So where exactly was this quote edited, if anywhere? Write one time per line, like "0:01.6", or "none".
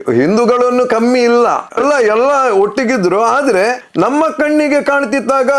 0:01.7
0:03.8